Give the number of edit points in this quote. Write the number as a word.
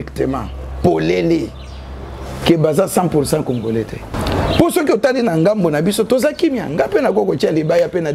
one